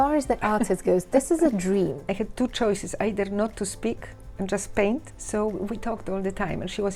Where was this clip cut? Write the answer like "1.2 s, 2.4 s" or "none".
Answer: 2.0 s, 5.1 s